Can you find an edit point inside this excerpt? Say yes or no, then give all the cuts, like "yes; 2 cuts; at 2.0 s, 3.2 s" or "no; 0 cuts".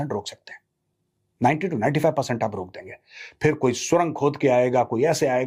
no; 0 cuts